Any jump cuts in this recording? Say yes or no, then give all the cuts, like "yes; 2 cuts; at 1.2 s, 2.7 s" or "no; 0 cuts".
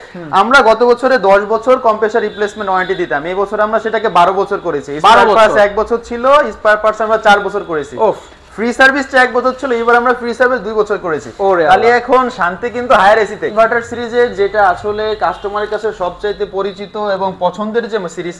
yes; 1 cut; at 13.5 s